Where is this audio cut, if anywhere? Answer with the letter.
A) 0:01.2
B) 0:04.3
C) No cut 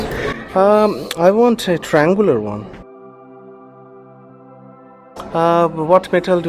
B